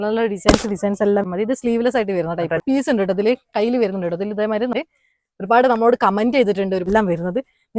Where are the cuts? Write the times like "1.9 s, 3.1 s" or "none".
1.3 s, 2.6 s, 4.7 s, 6.9 s